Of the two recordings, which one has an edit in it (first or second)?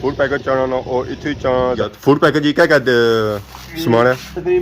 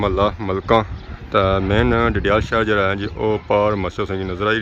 first